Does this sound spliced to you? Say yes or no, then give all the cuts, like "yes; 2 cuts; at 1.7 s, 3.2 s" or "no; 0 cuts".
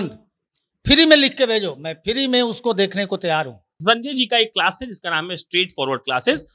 yes; 1 cut; at 3.8 s